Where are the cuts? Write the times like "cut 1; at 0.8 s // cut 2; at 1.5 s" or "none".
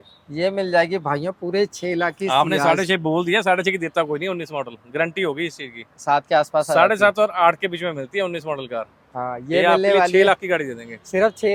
none